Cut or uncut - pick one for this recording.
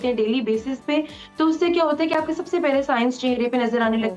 uncut